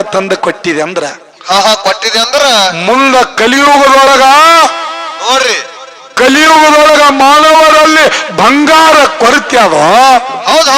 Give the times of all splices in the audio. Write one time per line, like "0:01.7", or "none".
none

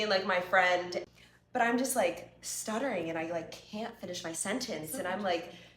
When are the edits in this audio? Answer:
0:01.1

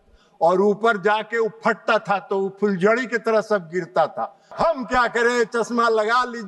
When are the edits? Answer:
0:04.5

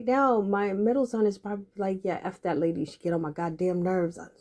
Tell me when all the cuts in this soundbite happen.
none

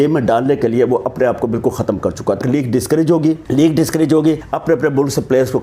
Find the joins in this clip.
0:02.4
0:03.4
0:04.5

